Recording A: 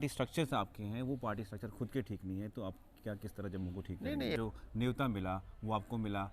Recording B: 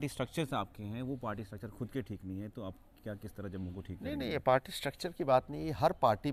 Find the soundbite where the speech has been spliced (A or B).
A